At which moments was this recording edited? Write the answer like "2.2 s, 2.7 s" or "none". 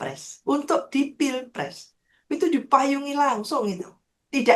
none